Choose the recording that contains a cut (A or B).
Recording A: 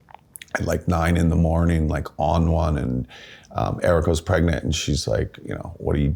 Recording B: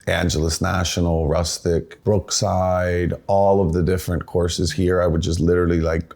B